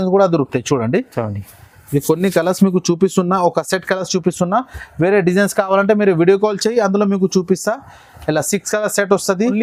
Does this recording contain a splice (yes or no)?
no